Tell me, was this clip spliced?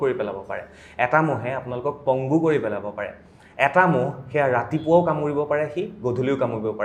no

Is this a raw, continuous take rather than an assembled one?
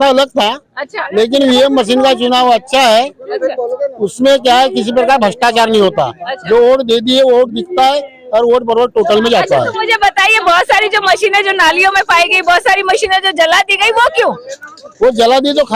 yes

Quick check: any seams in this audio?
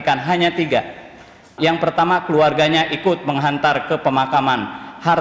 yes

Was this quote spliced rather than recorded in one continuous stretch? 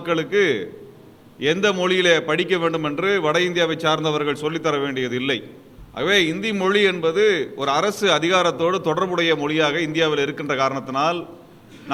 yes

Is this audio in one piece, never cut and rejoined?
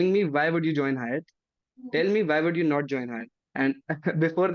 yes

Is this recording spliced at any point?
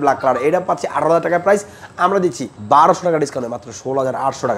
yes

